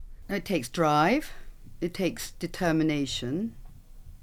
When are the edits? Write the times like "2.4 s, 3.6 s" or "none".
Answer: none

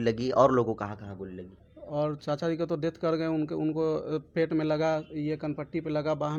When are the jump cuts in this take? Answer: none

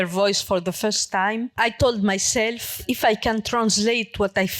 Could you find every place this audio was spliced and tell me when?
2.8 s

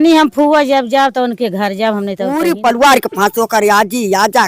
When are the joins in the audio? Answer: 2.3 s

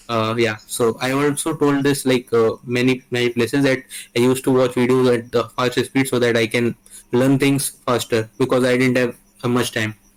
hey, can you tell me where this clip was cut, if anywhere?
none

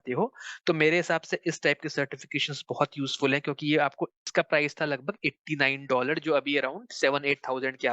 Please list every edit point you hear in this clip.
4.2 s

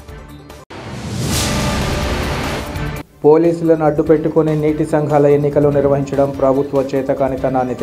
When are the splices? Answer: 1.6 s

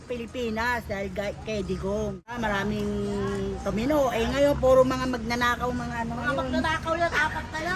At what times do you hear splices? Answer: 2.4 s

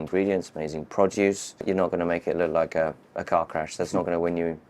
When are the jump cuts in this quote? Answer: none

